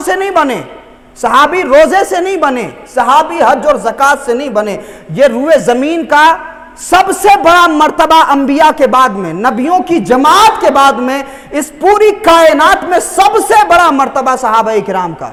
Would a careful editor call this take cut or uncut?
uncut